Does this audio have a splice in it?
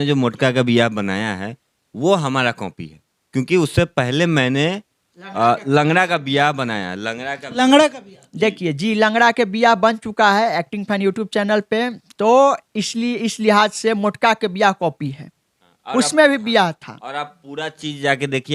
no; 0 cuts

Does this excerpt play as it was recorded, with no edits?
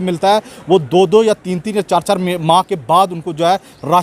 yes; 0 cuts

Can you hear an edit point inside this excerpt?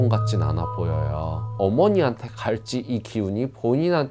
yes; 1 cut; at 1.5 s

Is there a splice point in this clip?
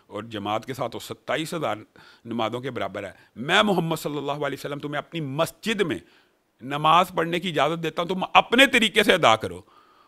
no; 0 cuts

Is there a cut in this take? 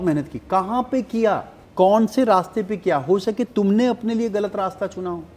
yes; 1 cut; at 1.6 s

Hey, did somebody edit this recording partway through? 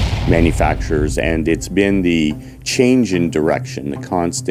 no; 0 cuts

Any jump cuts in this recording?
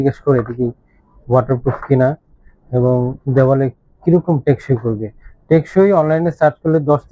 no; 0 cuts

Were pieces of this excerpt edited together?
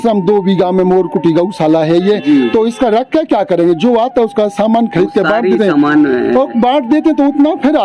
no; 0 cuts

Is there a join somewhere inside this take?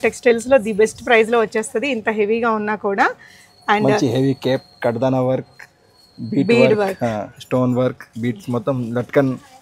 no; 0 cuts

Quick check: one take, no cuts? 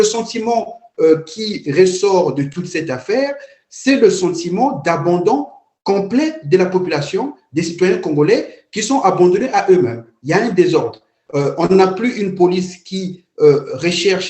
no; 1 cut; at 10.1 s

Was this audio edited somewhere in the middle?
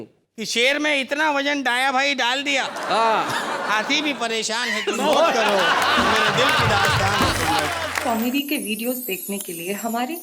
yes; 1 cut; at 7.9 s

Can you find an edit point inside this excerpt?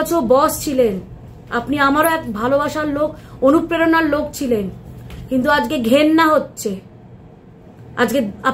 no; 0 cuts

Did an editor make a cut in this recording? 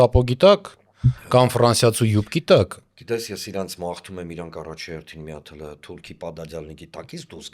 no; 0 cuts

